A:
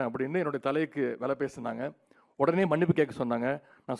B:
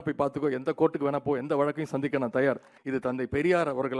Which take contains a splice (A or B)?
B